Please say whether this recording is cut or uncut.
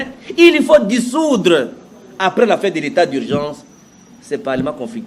uncut